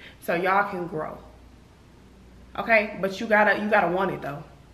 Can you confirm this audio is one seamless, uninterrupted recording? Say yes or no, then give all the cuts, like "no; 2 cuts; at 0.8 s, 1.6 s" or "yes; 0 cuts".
yes; 0 cuts